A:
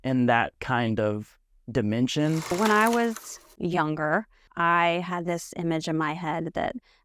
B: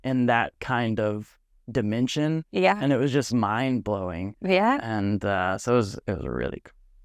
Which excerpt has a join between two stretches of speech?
A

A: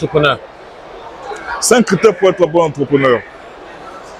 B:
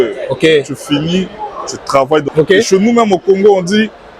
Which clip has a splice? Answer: B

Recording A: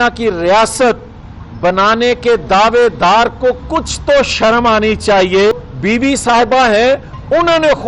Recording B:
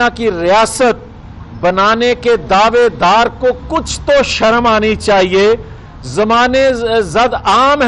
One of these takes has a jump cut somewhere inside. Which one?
A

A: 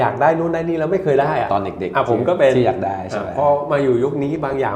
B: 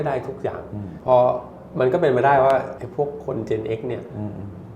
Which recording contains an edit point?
B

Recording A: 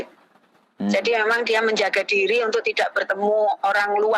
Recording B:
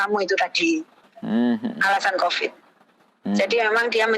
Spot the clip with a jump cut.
B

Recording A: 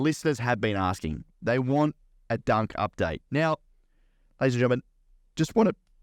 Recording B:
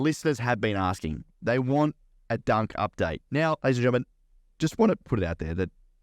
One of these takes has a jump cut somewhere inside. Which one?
B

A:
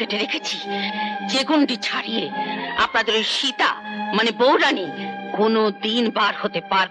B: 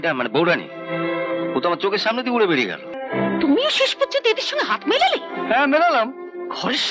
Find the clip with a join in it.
B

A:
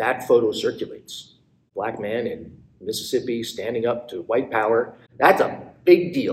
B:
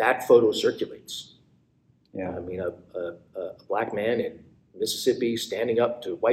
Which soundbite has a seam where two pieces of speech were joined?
A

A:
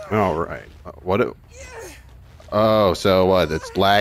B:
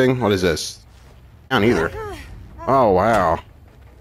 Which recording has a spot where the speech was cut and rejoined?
B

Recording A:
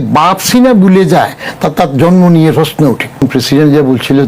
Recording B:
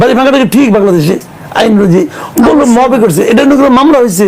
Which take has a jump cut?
A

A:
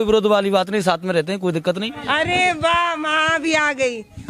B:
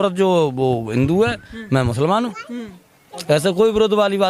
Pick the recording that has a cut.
A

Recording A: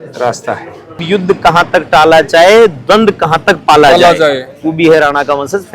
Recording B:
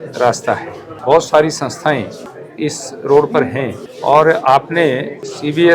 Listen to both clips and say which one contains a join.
A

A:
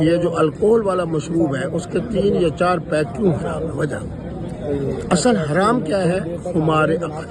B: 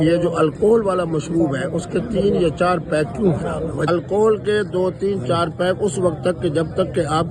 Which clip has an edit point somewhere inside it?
B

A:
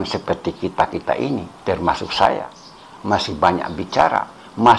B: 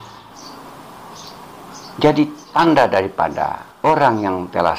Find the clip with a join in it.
B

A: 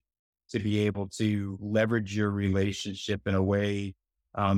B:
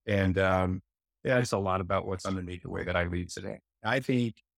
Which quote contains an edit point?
B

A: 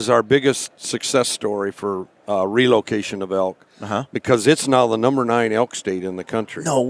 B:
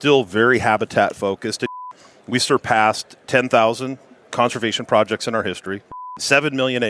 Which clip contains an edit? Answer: B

